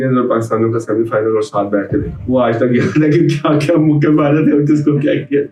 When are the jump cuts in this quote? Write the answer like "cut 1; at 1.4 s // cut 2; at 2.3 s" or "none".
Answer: none